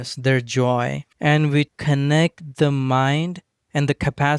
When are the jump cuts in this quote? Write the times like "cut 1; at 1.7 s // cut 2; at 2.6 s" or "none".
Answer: cut 1; at 1.1 s // cut 2; at 1.8 s